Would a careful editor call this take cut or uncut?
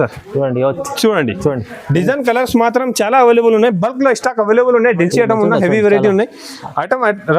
cut